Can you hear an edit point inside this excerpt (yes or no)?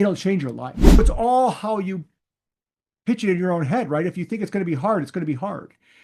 yes